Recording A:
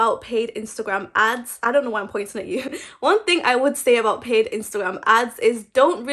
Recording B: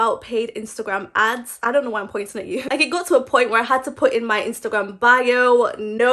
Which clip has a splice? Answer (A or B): B